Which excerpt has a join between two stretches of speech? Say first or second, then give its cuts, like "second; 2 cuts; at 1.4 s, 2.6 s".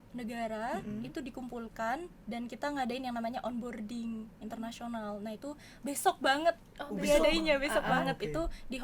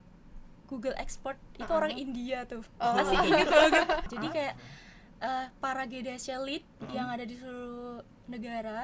second; 1 cut; at 4.1 s